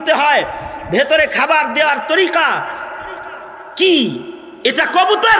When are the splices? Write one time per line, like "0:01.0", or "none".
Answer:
none